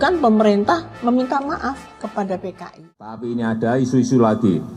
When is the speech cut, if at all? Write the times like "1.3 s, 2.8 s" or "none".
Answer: 3.2 s